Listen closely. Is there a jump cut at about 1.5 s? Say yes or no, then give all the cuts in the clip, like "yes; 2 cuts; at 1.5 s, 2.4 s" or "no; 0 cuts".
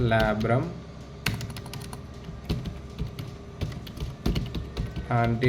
no; 0 cuts